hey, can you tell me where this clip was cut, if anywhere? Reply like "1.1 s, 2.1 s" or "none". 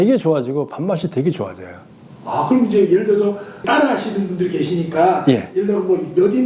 none